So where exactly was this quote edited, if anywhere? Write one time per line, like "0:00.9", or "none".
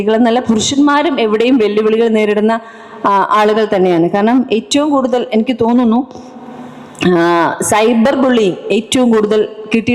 none